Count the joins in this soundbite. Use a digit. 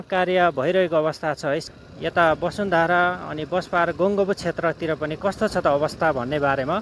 1